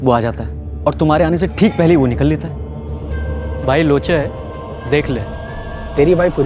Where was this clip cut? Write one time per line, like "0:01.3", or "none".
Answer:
none